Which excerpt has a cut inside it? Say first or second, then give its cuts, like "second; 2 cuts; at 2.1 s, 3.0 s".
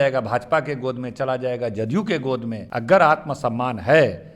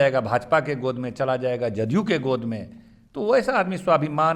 first; 1 cut; at 2.6 s